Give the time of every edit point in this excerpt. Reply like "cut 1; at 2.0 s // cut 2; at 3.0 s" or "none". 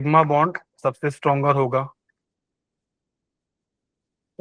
none